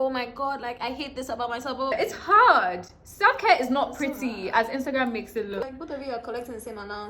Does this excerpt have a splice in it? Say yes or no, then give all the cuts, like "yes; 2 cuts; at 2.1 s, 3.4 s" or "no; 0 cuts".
yes; 2 cuts; at 1.9 s, 5.6 s